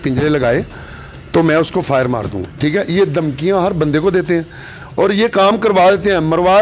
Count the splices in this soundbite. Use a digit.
1